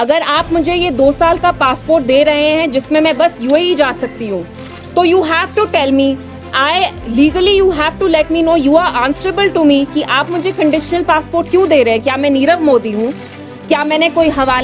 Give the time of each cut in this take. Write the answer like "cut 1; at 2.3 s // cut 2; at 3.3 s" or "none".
none